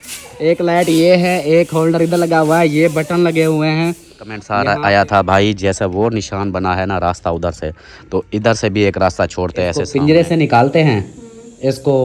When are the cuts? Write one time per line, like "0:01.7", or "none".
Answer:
0:04.5
0:09.8